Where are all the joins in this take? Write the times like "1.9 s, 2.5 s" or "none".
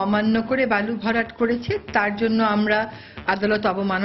none